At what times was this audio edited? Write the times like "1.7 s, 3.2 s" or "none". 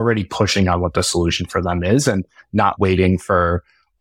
2.7 s